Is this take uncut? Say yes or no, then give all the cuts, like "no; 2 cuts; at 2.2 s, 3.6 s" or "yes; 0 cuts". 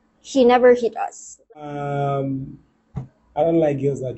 no; 1 cut; at 1.4 s